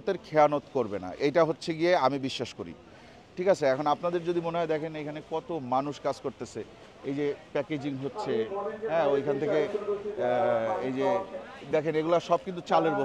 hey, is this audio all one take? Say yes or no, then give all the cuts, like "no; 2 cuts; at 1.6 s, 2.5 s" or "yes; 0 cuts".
yes; 0 cuts